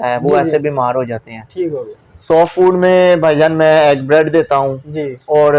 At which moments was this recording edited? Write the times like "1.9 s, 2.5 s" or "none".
1.9 s